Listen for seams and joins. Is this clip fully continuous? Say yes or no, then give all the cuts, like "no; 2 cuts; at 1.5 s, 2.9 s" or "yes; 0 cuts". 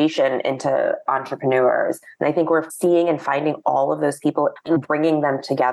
no; 1 cut; at 4.6 s